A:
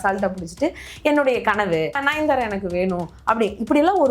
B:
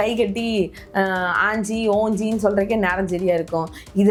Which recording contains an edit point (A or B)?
A